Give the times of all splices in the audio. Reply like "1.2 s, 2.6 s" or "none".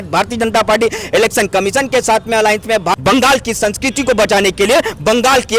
3.0 s